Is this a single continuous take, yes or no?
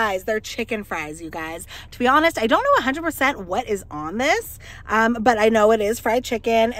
yes